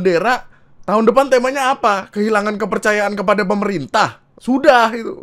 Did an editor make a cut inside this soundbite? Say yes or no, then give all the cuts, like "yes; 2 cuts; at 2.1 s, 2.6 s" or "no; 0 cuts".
yes; 1 cut; at 4.3 s